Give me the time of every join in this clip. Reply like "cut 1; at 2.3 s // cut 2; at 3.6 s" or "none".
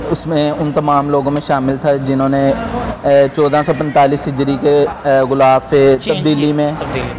none